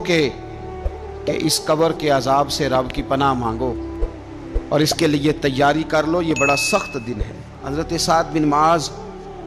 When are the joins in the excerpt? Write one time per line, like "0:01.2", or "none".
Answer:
0:07.6